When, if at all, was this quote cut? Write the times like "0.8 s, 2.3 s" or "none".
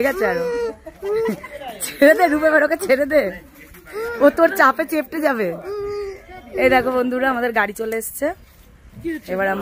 none